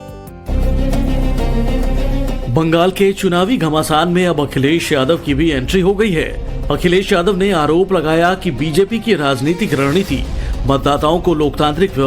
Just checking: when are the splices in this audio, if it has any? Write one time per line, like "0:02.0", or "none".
0:09.4

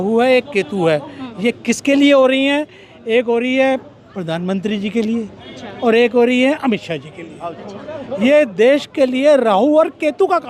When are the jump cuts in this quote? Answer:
none

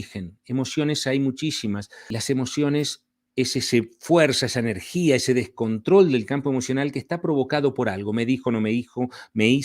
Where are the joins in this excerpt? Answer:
0:02.1

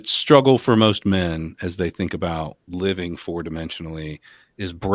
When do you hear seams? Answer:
0:02.6

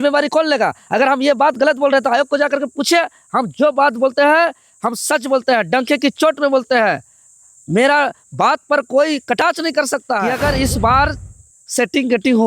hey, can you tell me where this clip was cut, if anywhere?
0:10.3

